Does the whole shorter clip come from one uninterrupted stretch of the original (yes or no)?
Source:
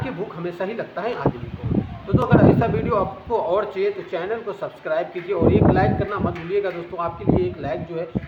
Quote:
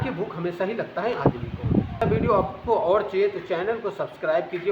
no